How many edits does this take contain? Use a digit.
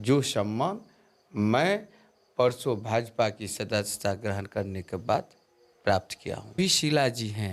1